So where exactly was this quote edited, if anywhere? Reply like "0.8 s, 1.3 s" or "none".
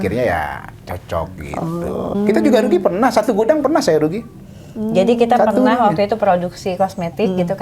2.1 s